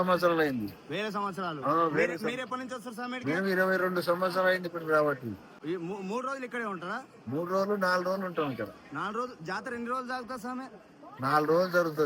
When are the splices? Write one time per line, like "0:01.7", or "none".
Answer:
none